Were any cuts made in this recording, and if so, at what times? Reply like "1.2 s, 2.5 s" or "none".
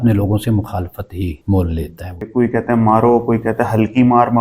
1.4 s, 2.3 s